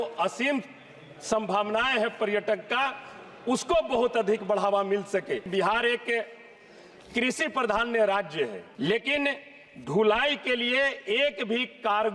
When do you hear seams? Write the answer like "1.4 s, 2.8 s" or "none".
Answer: 5.5 s, 8.6 s